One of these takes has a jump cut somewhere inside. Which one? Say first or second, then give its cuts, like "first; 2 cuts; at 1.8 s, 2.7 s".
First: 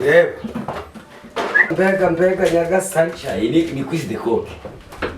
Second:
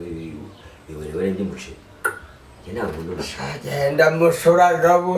first; 1 cut; at 1.7 s